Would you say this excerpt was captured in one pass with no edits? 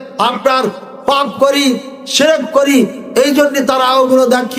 yes; 0 cuts

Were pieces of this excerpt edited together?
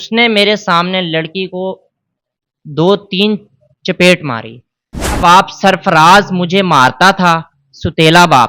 yes; 1 cut; at 5.2 s

